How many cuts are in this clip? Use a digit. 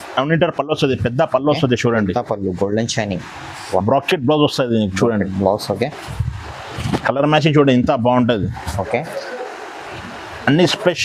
0